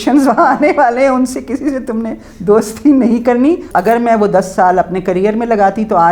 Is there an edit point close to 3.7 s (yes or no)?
yes